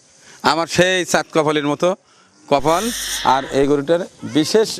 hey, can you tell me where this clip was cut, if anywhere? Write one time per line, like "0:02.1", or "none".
0:03.1